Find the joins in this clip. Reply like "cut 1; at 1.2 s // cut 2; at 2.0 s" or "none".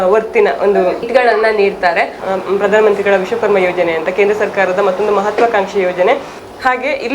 cut 1; at 1.0 s